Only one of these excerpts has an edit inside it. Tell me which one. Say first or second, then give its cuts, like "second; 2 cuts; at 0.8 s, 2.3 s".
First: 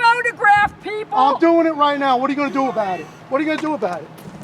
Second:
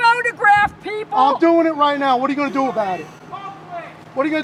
first; 1 cut; at 3.1 s